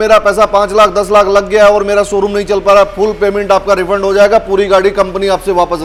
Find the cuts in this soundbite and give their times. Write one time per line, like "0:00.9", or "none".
none